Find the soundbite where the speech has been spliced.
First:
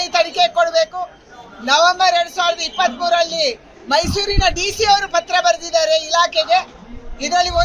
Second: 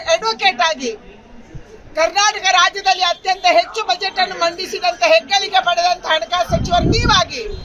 first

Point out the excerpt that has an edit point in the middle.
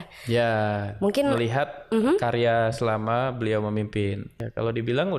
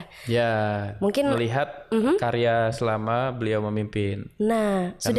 first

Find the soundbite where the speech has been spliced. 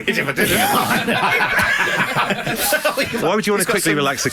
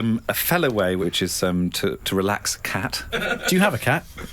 second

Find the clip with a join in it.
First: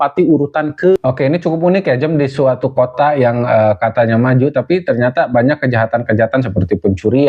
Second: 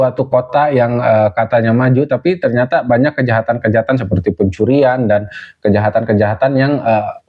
first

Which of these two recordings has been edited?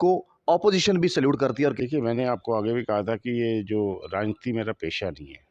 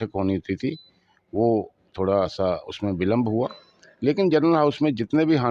first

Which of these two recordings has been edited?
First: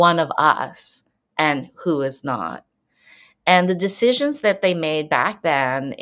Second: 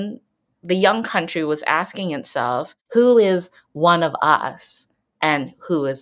second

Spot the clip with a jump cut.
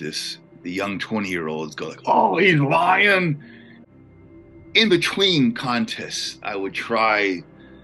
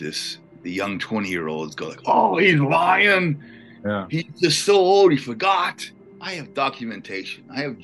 first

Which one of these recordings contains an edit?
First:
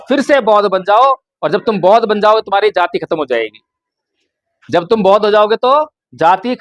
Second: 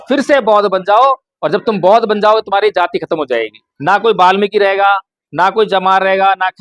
second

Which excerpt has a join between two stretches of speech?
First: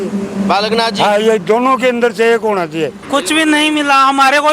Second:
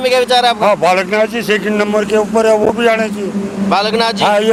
first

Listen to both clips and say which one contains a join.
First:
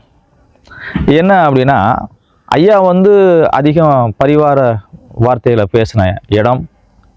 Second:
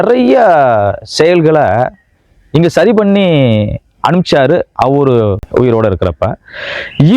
second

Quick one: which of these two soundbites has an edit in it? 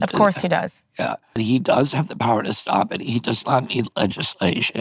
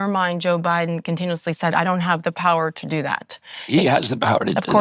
first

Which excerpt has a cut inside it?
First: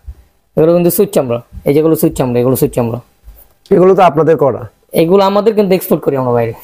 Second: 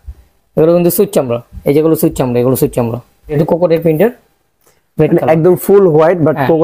second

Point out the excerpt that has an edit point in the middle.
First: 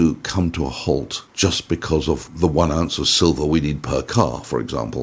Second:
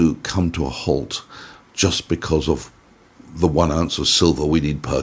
first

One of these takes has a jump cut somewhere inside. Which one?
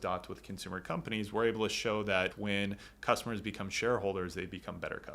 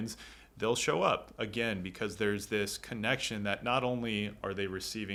first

